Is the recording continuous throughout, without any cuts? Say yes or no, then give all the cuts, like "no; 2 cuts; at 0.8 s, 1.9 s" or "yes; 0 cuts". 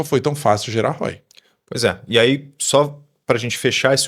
yes; 0 cuts